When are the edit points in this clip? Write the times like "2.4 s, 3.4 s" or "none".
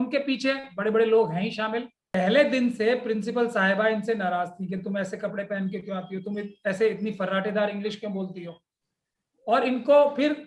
2.0 s